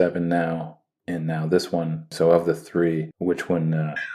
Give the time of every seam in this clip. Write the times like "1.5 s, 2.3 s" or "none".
2.1 s, 3.1 s